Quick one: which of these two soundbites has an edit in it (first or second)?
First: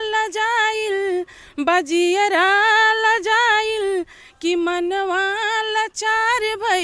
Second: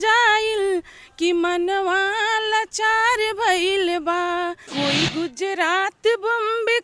second